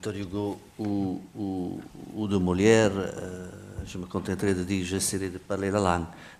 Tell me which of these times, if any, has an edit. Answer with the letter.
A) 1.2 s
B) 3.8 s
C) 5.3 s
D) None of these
B